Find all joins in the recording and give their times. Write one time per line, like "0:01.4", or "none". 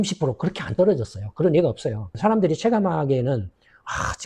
none